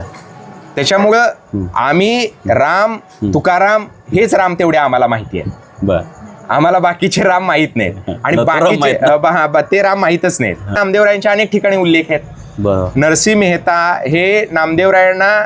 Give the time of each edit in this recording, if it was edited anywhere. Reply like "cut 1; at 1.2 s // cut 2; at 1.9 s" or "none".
cut 1; at 10.8 s